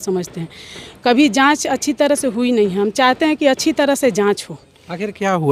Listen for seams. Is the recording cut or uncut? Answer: uncut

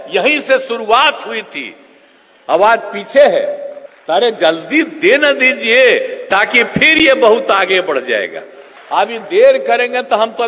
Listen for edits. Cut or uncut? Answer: cut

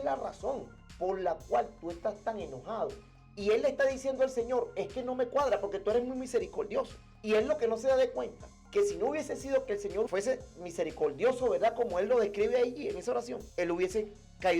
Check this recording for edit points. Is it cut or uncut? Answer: cut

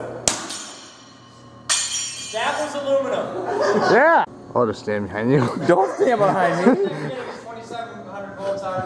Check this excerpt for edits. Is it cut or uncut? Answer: cut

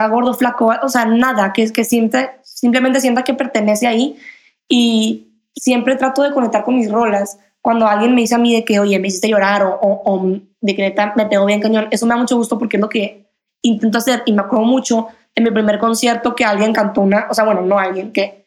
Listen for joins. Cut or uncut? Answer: cut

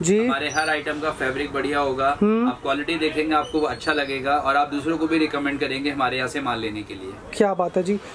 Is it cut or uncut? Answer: uncut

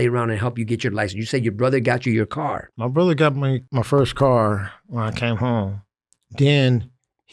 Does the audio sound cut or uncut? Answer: cut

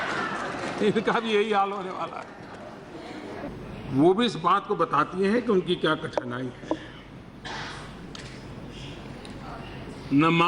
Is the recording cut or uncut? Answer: cut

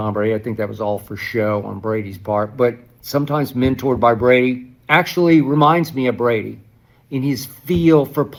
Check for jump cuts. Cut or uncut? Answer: uncut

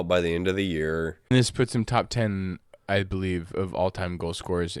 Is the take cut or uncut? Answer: cut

